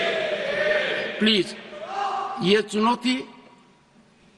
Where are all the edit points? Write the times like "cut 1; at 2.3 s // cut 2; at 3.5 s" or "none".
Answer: none